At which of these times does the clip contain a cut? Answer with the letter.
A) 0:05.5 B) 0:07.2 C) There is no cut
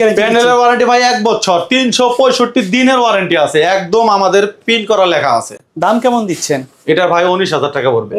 C